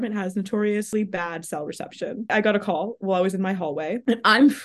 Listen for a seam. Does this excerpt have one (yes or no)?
yes